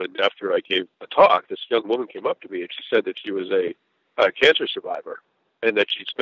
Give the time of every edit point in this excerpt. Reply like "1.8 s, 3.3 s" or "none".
1.0 s